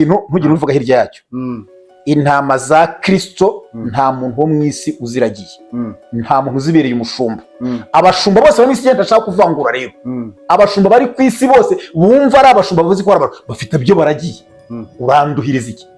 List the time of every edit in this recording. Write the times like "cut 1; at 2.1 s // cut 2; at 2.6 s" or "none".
none